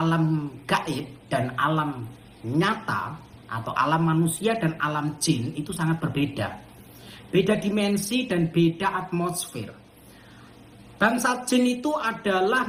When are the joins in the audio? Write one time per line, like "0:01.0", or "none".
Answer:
none